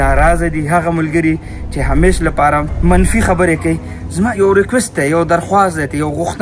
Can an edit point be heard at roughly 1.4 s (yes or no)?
no